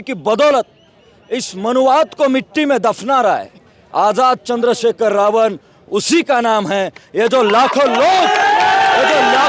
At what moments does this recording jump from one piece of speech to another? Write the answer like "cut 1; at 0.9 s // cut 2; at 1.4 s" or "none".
none